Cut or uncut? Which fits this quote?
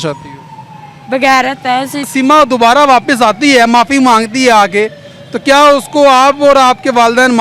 cut